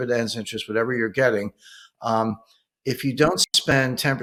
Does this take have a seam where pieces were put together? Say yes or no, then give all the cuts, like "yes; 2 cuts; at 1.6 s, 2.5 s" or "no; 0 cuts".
no; 0 cuts